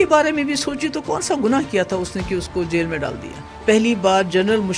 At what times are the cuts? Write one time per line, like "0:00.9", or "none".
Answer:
0:03.6